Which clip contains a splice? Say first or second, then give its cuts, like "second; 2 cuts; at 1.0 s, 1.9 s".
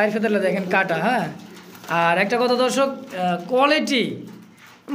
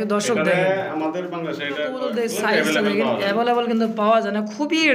second; 1 cut; at 1.8 s